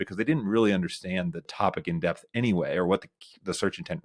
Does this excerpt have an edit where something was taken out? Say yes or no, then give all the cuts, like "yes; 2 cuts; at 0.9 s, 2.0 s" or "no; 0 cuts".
no; 0 cuts